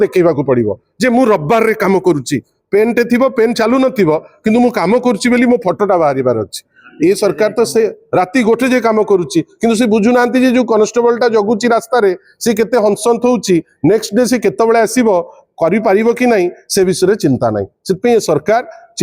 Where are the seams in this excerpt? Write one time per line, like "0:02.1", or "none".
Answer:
none